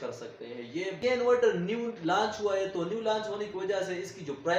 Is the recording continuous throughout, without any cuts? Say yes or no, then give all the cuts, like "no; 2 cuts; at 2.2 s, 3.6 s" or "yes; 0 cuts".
no; 1 cut; at 1.0 s